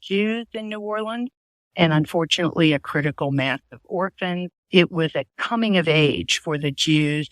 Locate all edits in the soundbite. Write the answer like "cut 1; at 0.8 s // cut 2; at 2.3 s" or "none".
cut 1; at 4.6 s